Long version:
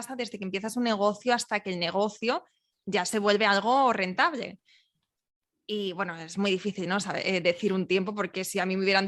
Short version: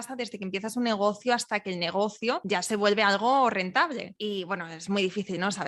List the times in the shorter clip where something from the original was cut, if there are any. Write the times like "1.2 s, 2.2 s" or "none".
2.4 s, 4.1 s